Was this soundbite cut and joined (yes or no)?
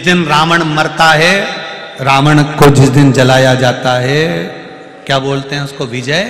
no